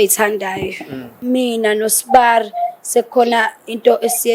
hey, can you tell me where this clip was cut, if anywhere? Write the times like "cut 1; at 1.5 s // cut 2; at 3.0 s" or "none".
cut 1; at 1.1 s